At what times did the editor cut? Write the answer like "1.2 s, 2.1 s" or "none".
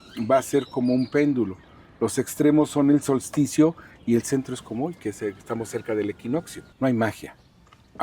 6.6 s